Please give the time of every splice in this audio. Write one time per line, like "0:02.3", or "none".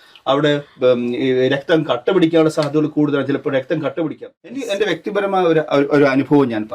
0:04.6